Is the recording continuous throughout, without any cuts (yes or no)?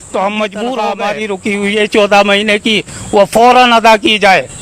no